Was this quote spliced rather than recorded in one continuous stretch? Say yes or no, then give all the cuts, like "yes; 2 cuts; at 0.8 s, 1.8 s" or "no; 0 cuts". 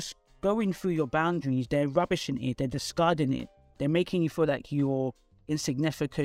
no; 0 cuts